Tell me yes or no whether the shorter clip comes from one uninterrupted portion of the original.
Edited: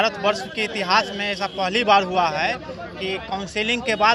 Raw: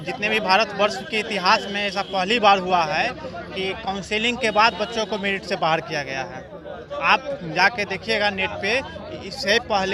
yes